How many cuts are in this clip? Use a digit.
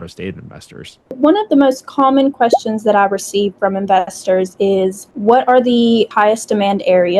1